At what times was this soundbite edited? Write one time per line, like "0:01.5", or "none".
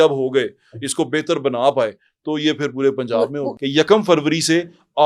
0:03.5